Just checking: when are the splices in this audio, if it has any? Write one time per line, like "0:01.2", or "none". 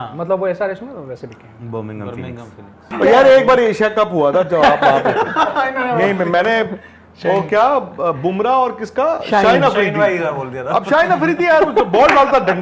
0:02.9